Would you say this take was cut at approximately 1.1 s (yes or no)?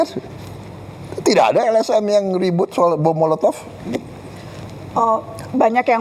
no